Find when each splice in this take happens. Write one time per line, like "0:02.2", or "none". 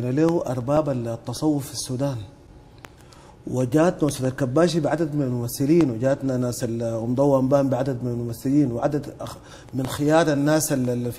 0:02.3